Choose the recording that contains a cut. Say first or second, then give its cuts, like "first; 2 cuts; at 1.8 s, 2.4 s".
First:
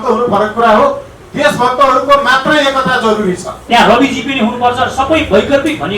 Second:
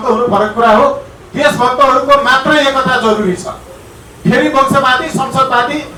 first; 1 cut; at 3.6 s